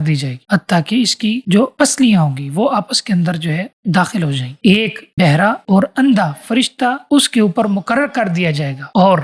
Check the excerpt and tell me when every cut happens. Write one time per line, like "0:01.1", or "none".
0:04.5